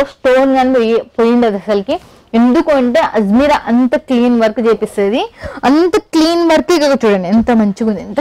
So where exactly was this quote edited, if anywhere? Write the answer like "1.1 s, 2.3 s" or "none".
none